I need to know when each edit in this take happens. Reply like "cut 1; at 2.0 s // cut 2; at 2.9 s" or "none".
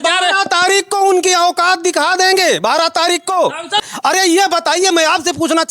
cut 1; at 3.9 s